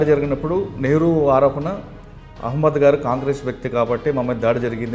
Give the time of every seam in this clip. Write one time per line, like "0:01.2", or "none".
none